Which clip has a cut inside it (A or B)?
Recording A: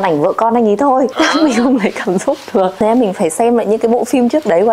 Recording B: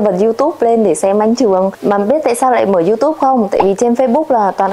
A